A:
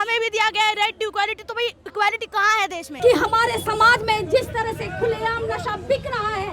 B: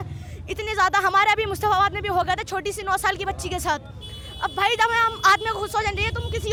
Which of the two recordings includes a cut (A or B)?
A